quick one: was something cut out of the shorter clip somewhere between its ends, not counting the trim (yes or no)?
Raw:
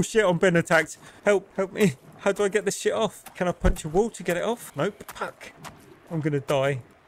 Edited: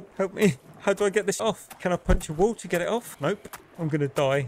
yes